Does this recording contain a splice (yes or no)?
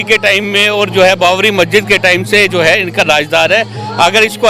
no